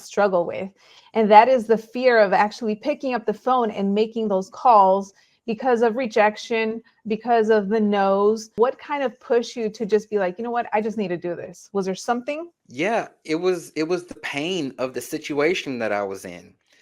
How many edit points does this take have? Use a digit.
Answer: 2